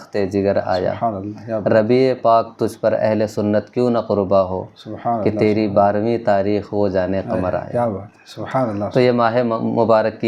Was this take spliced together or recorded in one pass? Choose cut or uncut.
uncut